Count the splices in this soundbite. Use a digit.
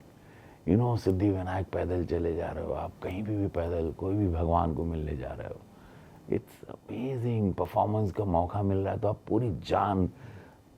0